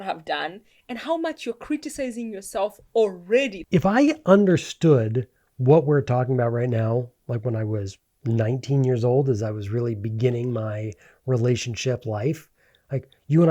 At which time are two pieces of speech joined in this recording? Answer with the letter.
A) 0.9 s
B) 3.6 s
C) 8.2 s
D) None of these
B